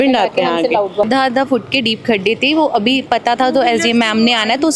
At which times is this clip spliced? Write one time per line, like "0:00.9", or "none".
0:01.0

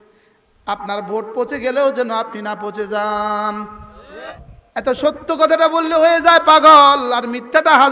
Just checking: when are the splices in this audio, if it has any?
0:04.2

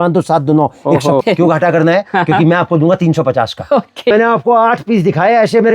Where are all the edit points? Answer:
0:01.2
0:04.1

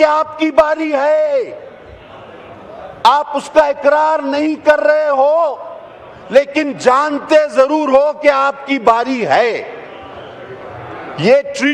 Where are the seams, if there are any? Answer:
none

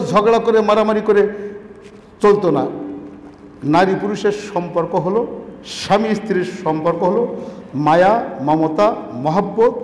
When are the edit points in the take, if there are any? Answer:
none

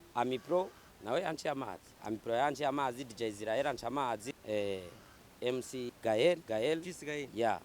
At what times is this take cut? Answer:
0:01.9
0:04.3
0:05.9
0:06.4

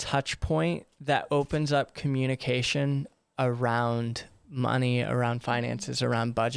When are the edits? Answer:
none

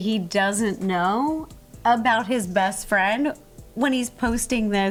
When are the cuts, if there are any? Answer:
none

